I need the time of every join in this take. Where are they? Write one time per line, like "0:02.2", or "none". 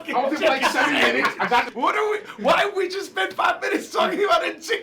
0:01.7